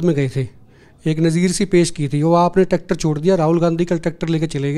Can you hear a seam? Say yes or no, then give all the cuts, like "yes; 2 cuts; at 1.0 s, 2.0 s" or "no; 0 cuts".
no; 0 cuts